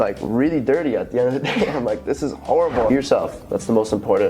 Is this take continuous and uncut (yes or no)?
no